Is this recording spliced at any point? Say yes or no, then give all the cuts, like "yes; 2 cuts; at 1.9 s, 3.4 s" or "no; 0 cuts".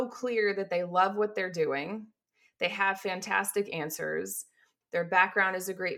yes; 1 cut; at 4.6 s